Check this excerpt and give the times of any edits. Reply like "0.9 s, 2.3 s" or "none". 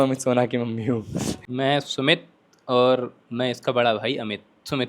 1.4 s

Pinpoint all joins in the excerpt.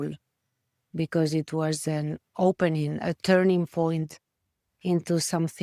none

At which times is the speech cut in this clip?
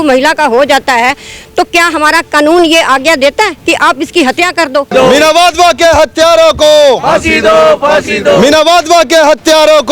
3.6 s, 4.9 s

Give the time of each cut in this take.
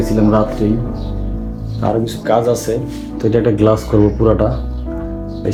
none

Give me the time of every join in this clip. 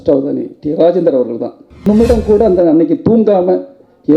1.8 s

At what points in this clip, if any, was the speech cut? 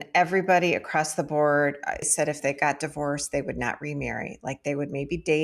2.1 s

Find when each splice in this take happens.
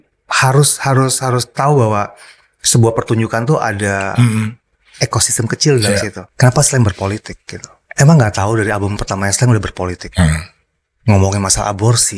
6.2 s

